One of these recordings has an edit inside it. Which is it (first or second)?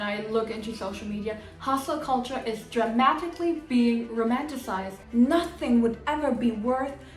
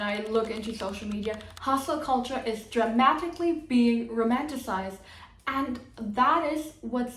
first